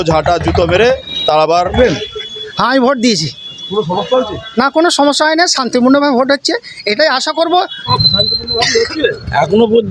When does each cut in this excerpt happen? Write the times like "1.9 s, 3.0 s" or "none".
1.7 s, 7.8 s